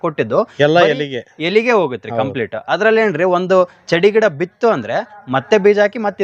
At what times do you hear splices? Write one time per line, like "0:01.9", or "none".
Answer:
none